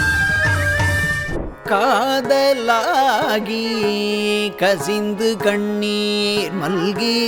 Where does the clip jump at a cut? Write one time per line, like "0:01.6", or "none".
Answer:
0:01.3